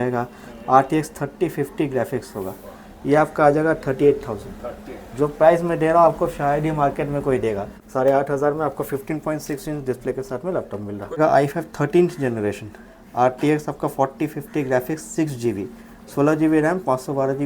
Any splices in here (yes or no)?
yes